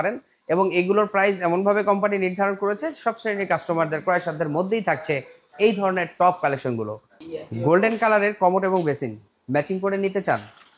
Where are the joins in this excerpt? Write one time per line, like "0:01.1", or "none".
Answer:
none